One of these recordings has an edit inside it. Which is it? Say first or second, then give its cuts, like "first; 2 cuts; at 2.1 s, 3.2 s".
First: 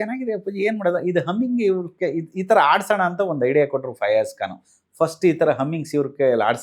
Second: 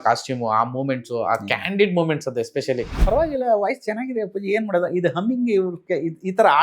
second; 1 cut; at 2.9 s